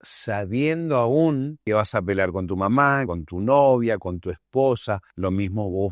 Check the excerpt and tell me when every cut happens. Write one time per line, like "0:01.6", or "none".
0:01.5
0:03.1
0:05.1